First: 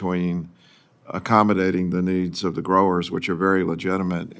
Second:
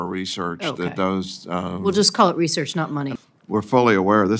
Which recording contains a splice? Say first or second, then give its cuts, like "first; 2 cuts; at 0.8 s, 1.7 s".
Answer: second; 1 cut; at 3.1 s